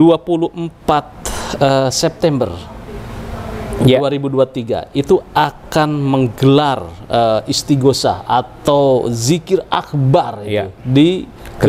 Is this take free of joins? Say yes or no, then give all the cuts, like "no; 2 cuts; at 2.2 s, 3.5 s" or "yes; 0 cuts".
yes; 0 cuts